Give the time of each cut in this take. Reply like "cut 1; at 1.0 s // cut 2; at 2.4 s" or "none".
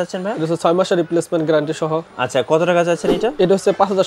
none